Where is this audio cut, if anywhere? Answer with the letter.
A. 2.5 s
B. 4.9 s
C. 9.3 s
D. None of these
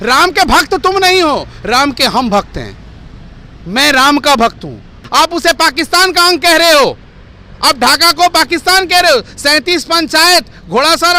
B